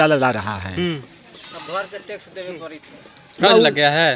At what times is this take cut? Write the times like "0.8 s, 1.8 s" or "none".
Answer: none